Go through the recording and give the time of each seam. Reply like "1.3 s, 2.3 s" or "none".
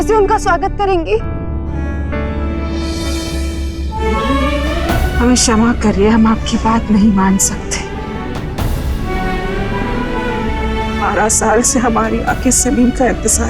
none